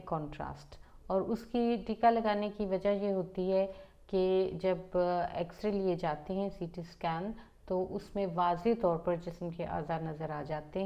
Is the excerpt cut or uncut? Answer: uncut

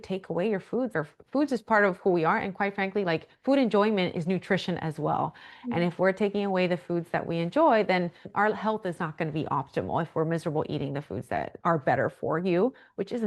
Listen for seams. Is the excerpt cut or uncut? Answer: cut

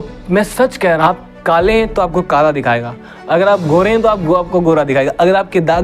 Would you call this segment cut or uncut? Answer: cut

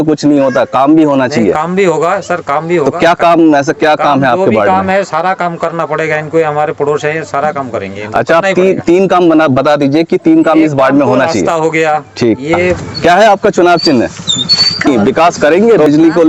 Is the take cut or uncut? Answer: cut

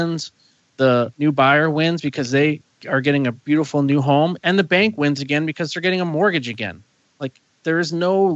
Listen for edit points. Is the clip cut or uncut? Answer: cut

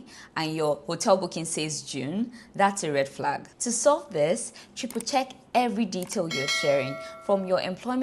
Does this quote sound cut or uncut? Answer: uncut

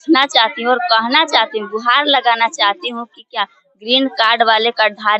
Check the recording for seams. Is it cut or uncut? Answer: uncut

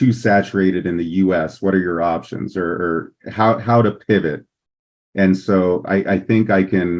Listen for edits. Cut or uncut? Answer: uncut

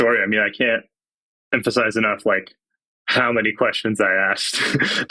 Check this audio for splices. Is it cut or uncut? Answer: uncut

